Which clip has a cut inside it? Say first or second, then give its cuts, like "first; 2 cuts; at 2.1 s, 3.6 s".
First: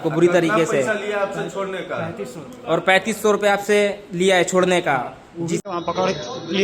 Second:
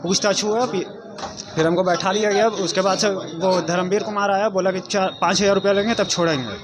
first; 1 cut; at 5.6 s